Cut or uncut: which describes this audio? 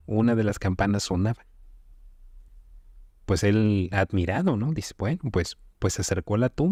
uncut